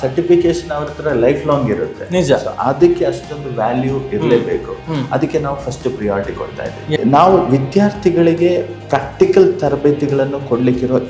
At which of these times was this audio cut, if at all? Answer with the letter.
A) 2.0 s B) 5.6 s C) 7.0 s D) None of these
C